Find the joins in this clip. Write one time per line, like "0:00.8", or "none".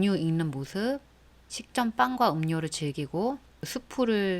0:03.5